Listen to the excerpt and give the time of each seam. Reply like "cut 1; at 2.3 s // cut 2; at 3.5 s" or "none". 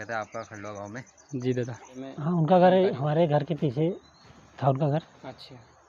cut 1; at 2.0 s